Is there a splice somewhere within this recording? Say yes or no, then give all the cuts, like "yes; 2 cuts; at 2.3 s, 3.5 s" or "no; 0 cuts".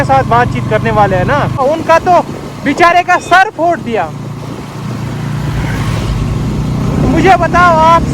yes; 1 cut; at 1.6 s